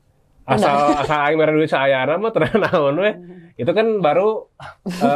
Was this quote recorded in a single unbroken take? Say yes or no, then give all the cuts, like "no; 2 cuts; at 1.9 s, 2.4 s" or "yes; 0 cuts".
yes; 0 cuts